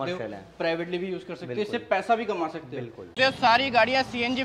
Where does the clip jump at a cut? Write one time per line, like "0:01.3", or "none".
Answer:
0:03.1